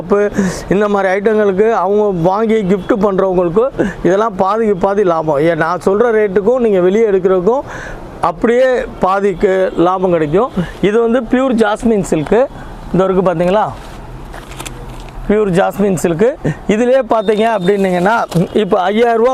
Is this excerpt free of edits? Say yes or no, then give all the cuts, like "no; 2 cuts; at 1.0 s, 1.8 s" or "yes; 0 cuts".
yes; 0 cuts